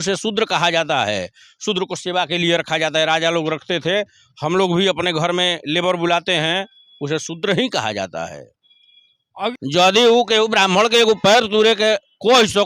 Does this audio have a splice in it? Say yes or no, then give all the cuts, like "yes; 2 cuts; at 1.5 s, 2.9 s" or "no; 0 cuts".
yes; 1 cut; at 9.5 s